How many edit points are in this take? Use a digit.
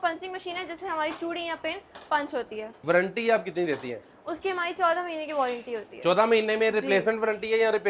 1